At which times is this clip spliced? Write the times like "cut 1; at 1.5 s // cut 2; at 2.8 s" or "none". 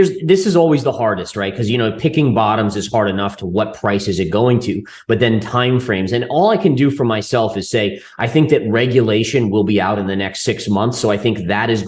none